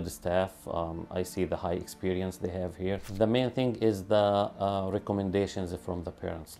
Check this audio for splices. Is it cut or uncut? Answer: cut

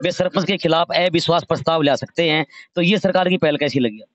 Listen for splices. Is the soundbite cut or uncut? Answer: uncut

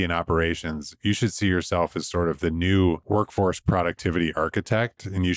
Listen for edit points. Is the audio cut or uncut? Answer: cut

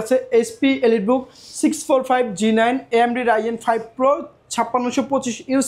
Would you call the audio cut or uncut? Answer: uncut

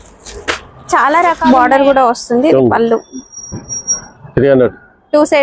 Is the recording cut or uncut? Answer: cut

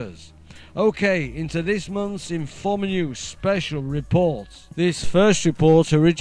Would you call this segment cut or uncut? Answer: uncut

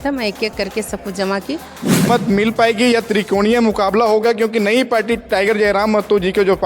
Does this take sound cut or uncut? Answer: cut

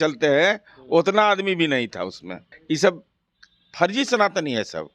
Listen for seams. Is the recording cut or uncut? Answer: cut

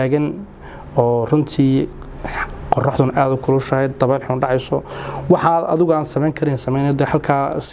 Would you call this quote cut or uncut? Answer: uncut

